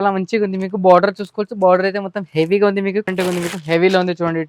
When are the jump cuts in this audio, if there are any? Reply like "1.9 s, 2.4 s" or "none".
3.1 s